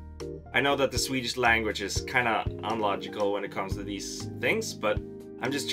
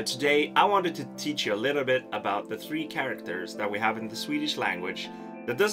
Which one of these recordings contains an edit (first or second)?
second